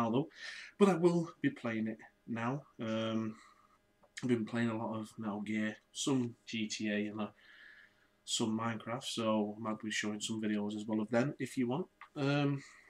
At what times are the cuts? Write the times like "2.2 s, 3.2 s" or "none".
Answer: 2.0 s

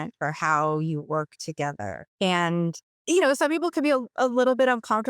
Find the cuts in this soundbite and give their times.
2.0 s, 2.9 s

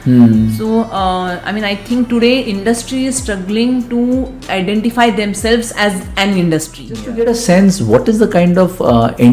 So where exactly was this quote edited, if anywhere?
7.0 s

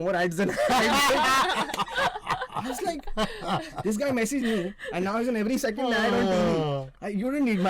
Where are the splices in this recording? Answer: none

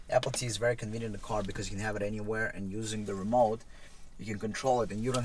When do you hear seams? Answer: none

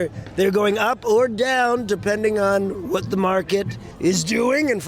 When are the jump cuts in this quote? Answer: 3.8 s

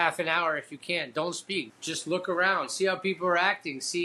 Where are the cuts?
1.7 s

